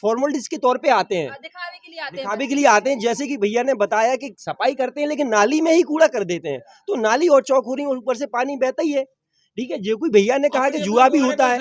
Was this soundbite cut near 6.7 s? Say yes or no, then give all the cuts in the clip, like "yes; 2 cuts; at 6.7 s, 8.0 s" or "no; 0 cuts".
no; 0 cuts